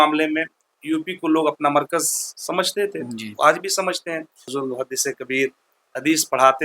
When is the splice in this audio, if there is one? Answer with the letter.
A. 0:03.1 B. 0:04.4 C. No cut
B